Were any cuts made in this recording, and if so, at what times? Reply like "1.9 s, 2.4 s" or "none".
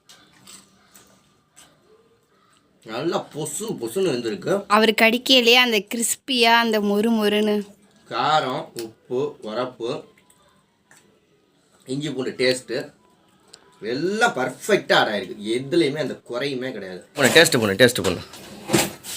17.2 s

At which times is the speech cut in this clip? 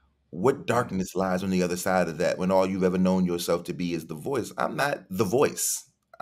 4.8 s

